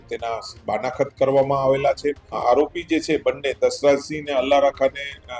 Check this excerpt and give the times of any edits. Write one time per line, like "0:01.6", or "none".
0:02.4

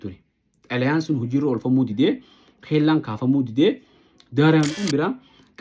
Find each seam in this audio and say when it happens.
0:04.7

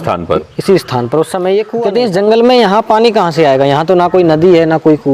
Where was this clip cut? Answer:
0:01.8

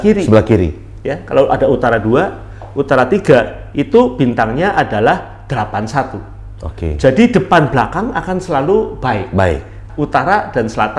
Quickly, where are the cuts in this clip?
0:09.8

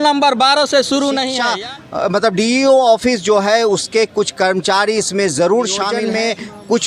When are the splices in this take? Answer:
0:01.4
0:06.0

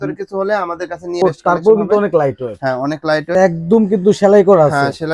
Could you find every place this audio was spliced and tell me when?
0:01.2
0:03.3

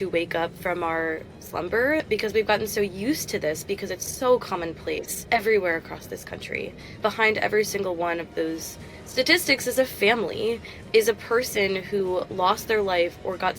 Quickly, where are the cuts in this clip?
0:02.0
0:05.2
0:07.0

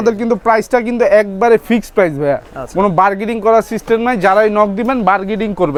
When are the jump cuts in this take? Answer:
none

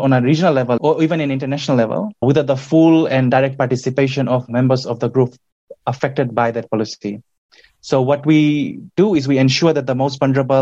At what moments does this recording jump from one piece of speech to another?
0:00.8
0:02.2

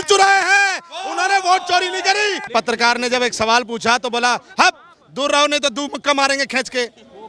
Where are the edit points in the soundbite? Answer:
0:02.4

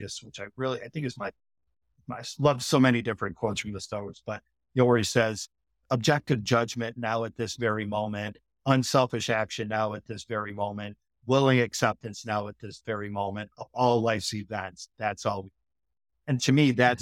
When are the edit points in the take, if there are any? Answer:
none

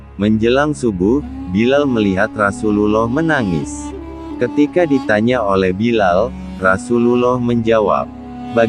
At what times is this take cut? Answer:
none

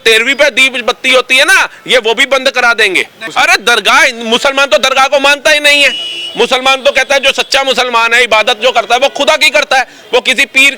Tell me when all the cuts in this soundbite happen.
0:03.2

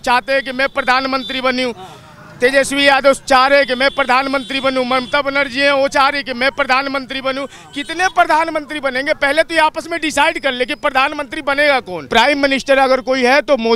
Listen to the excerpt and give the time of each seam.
0:12.0

